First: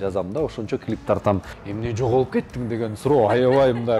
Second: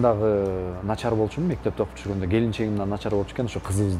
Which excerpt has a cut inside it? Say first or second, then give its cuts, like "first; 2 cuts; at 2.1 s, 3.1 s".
first; 1 cut; at 1.5 s